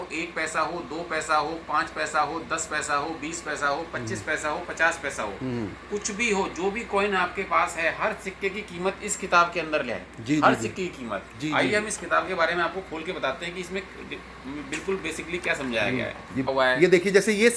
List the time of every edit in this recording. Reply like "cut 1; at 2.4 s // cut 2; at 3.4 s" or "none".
cut 1; at 16.7 s